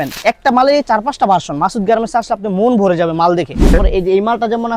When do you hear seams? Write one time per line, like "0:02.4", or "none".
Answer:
0:03.7